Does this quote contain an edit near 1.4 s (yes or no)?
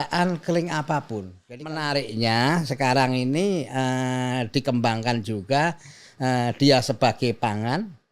yes